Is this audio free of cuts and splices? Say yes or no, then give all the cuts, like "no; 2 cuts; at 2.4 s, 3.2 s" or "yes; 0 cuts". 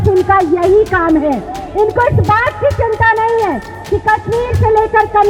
yes; 0 cuts